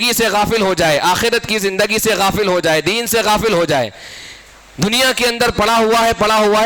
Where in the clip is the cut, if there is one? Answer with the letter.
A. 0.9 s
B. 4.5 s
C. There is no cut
C